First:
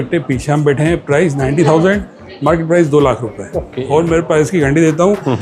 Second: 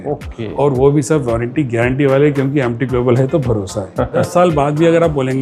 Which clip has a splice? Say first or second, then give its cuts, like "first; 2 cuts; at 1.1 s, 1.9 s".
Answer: second; 1 cut; at 4.3 s